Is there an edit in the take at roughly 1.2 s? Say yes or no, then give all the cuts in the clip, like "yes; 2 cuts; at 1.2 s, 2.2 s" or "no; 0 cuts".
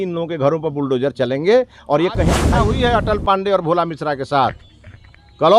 no; 1 cut; at 2.5 s